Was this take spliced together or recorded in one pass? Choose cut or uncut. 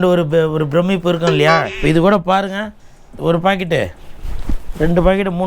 cut